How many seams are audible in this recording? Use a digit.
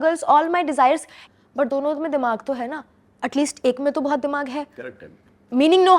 1